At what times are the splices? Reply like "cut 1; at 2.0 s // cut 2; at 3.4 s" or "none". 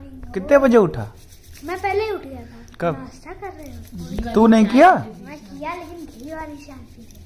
none